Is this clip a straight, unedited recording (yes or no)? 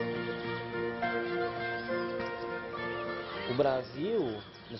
yes